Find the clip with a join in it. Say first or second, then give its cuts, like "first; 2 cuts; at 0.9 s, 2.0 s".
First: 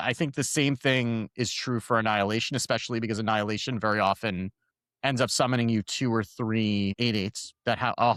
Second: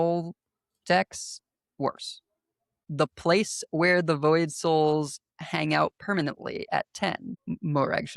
second; 2 cuts; at 2.8 s, 7.3 s